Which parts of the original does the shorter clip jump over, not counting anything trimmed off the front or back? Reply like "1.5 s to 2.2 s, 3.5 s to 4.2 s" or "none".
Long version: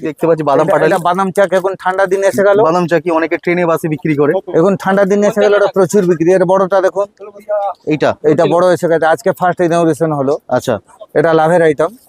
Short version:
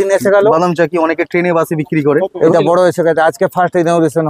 4.6 s to 8.4 s

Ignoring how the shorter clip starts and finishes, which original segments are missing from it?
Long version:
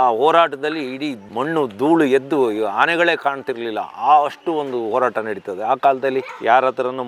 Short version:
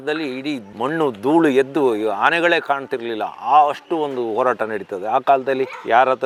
none

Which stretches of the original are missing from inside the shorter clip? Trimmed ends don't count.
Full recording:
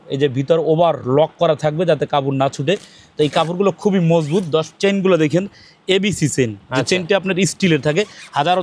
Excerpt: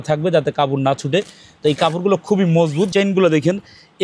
4.4 s to 4.8 s

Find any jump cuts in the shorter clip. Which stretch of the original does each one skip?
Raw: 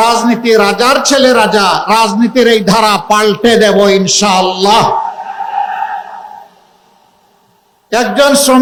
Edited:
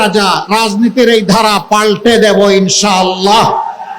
none

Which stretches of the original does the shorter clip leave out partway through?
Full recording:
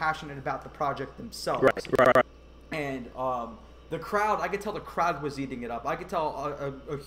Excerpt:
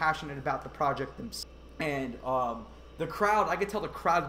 1.4 s to 2.3 s

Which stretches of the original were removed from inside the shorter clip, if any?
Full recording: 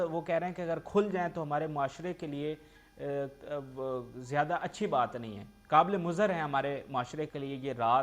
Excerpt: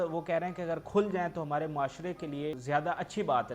2.6 s to 4.2 s

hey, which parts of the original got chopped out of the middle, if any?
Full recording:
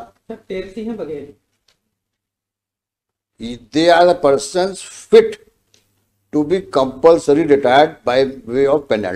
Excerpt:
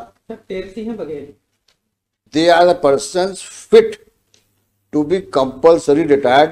2.2 s to 3.6 s

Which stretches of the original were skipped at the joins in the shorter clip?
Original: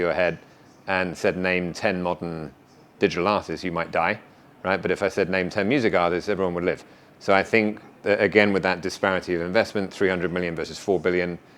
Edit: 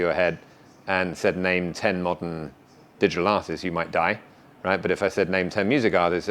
none

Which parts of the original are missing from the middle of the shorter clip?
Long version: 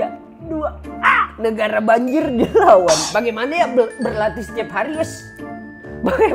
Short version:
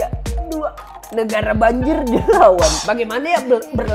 1.0 s to 1.3 s

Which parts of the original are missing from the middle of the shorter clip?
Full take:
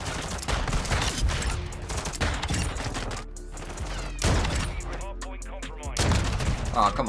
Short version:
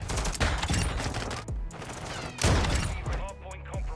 none

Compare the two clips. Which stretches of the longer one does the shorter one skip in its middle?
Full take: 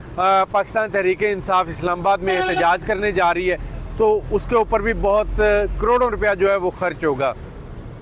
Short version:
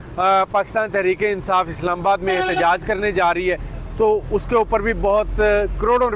none

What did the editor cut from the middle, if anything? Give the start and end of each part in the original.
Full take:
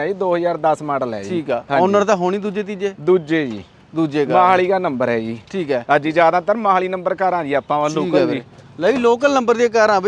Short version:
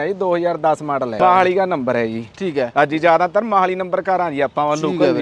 1.2 s to 4.3 s

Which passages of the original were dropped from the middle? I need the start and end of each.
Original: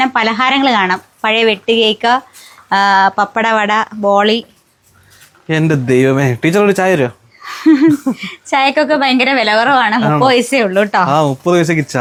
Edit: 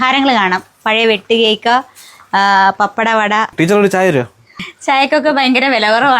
3.9 s to 6.4 s, 7.5 s to 8.3 s

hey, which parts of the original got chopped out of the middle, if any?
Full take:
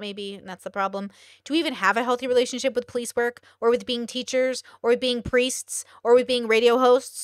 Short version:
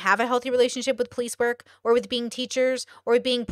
none

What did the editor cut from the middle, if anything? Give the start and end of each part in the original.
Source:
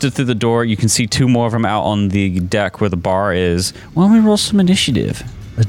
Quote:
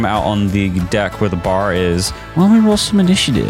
none

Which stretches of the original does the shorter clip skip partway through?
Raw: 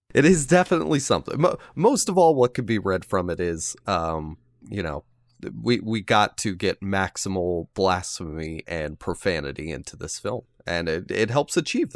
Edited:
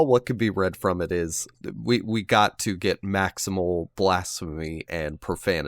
3.7 s to 5.2 s

